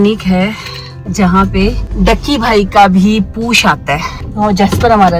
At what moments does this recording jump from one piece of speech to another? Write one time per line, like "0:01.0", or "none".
0:01.0
0:01.8
0:04.2